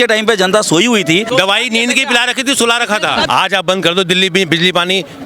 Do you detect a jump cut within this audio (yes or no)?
yes